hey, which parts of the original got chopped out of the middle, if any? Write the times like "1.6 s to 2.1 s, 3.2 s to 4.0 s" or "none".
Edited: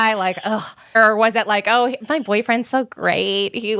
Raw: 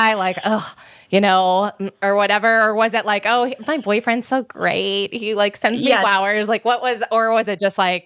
1.0 s to 2.5 s